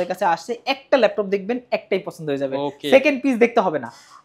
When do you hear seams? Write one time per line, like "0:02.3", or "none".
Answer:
none